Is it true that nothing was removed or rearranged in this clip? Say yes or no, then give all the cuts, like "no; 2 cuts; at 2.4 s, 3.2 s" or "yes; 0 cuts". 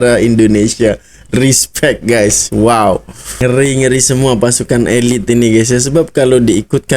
no; 1 cut; at 3.5 s